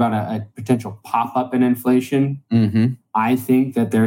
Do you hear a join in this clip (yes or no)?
yes